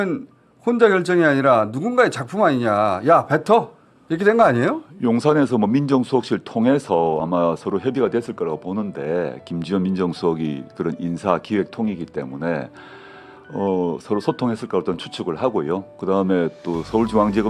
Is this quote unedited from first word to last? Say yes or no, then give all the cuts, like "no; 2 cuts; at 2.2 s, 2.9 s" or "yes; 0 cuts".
yes; 0 cuts